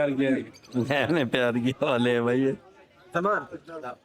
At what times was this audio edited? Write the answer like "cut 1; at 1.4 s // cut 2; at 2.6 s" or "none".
none